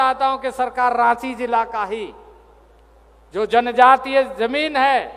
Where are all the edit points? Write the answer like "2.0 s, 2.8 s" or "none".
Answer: none